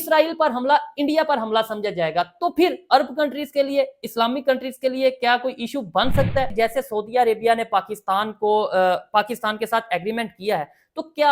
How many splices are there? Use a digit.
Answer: 1